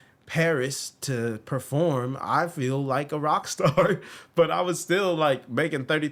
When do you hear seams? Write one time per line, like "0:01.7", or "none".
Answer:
none